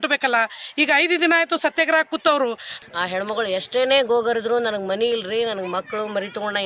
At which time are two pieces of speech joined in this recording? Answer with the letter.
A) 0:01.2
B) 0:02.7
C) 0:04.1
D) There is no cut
B